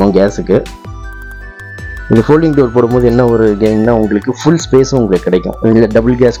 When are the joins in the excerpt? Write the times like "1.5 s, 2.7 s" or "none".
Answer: none

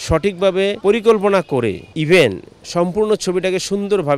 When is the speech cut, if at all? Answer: 0.8 s, 1.9 s

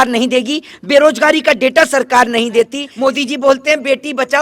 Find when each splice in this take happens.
2.8 s

